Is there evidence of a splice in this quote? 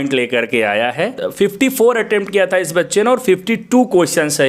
yes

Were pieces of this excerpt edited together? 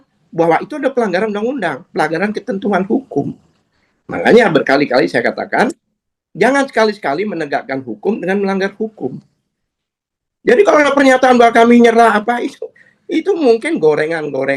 no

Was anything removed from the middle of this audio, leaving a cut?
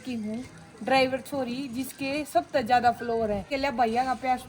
yes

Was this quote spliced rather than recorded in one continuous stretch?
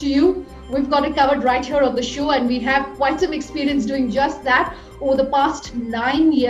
no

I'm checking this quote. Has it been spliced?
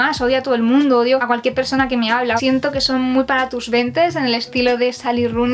yes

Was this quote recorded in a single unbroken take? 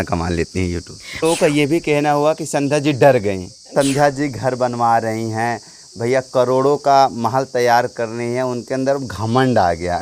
no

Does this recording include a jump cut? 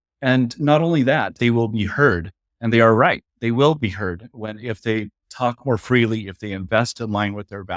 yes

